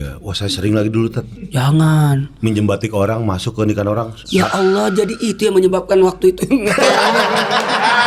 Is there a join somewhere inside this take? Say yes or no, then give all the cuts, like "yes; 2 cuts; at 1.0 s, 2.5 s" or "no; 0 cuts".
no; 0 cuts